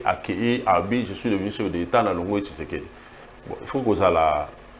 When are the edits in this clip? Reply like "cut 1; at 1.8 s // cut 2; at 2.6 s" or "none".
none